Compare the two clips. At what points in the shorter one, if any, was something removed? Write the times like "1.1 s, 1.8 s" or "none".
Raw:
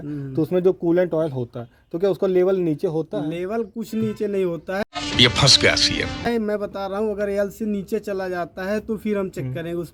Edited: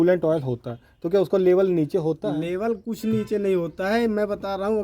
3.9 s